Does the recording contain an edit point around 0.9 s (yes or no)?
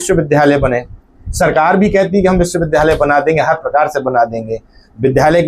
no